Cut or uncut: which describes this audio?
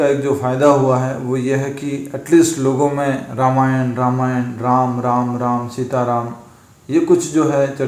uncut